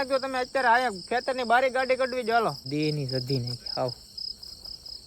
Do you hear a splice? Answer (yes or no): yes